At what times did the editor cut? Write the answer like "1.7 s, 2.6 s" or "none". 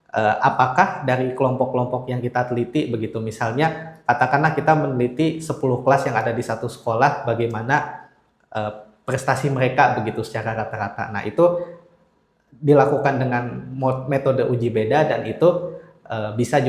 none